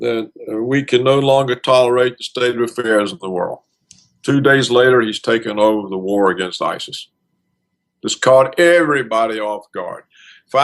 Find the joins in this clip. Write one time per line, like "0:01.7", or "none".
none